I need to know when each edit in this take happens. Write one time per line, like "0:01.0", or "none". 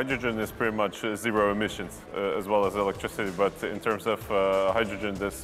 none

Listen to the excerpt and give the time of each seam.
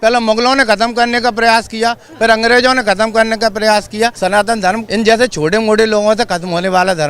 0:04.4

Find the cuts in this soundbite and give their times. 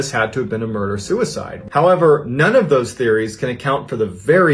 0:01.6

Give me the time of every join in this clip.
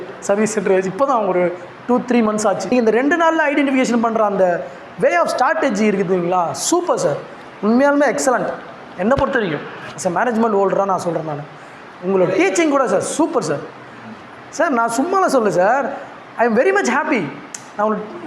0:02.6

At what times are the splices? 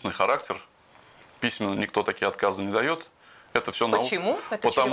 none

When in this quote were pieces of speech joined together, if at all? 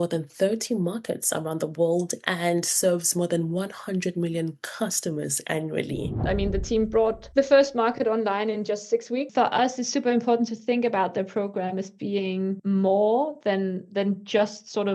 0:06.2
0:07.2
0:09.3
0:12.6

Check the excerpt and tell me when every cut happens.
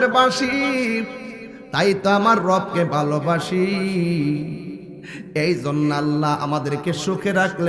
none

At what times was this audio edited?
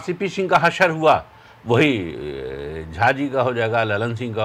none

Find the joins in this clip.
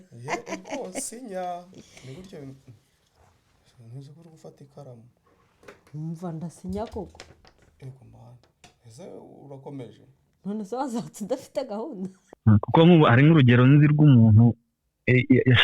0:12.3

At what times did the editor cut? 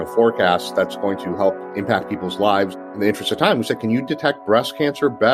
0:01.6
0:02.9

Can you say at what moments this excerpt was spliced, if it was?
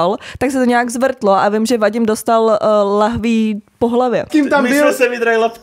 0:04.3

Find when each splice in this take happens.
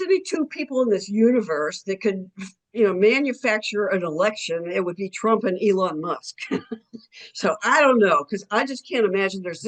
none

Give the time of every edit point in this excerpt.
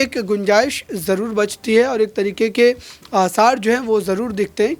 none

